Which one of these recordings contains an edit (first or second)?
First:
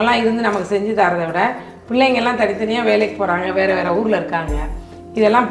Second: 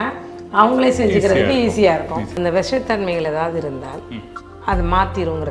second